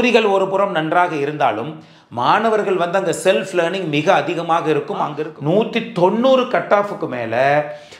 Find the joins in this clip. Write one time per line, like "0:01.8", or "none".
0:05.1